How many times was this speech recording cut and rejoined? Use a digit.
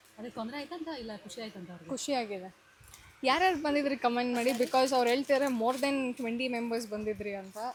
0